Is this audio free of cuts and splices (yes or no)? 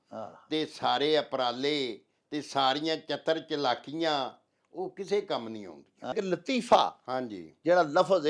no